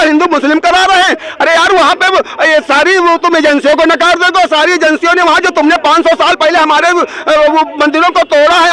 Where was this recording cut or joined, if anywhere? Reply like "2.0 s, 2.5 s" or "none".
none